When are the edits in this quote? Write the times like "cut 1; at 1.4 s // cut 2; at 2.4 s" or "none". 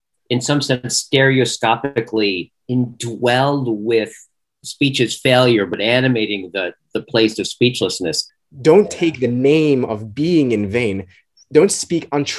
cut 1; at 4.6 s // cut 2; at 5.7 s // cut 3; at 8.2 s // cut 4; at 11.3 s